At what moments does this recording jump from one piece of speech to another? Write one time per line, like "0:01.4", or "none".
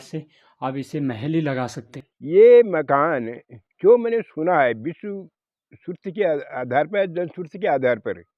0:01.9

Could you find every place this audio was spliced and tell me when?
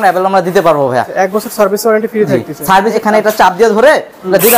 0:01.1
0:02.9

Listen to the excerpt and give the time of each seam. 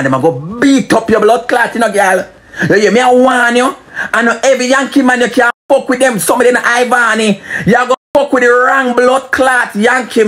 none

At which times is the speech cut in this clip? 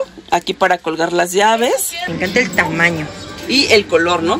0:02.0

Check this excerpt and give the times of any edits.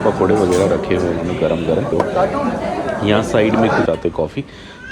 0:01.9
0:03.8

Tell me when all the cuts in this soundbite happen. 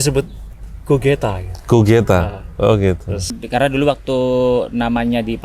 0:03.3

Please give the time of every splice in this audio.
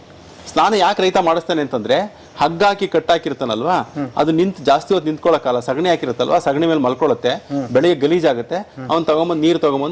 none

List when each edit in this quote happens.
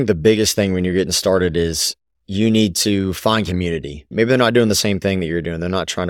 0:04.1

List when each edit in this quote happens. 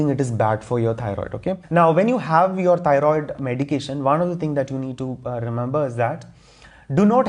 0:01.5

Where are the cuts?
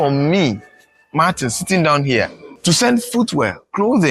0:02.4

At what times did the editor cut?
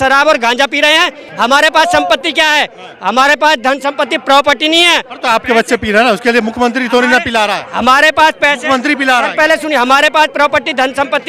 none

